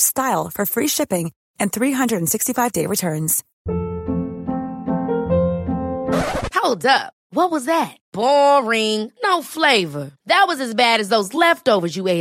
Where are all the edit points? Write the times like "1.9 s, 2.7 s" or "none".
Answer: 3.5 s